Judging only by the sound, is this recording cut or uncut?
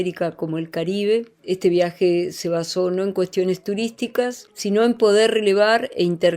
cut